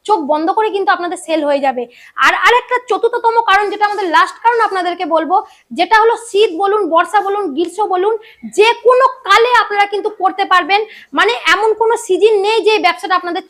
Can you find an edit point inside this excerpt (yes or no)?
no